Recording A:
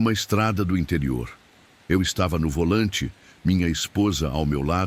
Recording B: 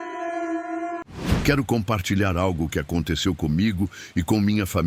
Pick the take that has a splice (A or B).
B